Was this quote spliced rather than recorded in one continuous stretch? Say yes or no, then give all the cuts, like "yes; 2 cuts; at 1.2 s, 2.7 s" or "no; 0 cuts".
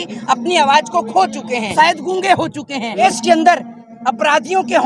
yes; 2 cuts; at 1.7 s, 3.0 s